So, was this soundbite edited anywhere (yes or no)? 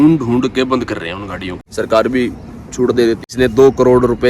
yes